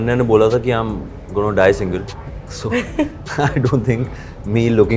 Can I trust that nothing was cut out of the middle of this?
yes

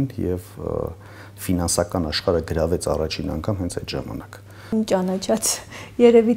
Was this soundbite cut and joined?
yes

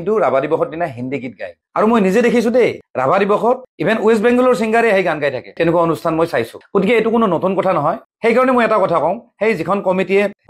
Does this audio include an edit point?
yes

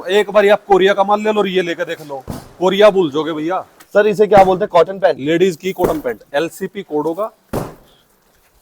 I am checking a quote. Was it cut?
yes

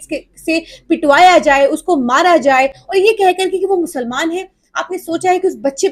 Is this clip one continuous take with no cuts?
yes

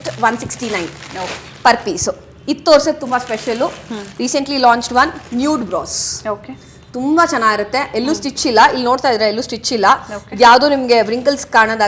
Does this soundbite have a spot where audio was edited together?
no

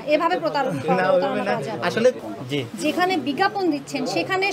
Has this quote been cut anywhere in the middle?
yes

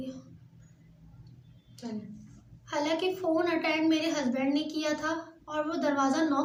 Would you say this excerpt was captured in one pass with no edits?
yes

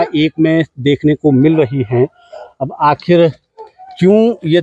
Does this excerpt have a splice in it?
no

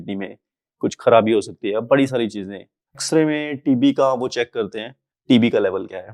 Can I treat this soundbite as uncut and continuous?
no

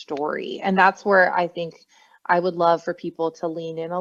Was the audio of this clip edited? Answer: no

